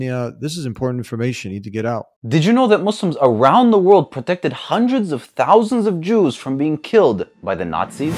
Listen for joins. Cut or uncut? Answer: uncut